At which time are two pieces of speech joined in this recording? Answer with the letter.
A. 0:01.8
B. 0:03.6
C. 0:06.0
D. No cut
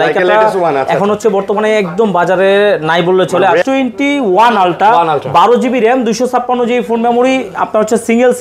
B